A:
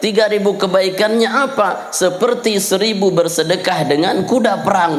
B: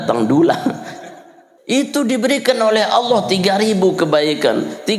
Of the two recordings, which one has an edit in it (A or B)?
B